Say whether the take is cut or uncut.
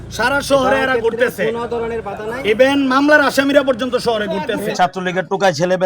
cut